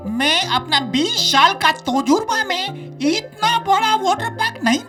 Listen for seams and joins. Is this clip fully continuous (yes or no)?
yes